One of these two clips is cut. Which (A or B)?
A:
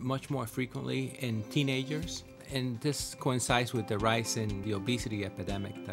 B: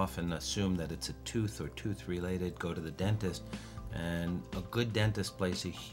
A